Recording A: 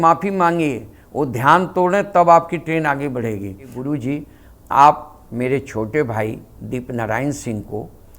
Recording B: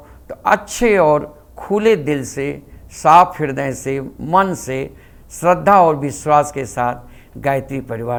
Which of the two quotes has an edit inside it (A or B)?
A